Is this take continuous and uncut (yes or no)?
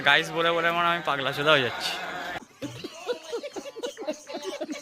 yes